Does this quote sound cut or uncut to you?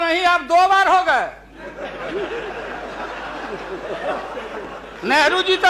uncut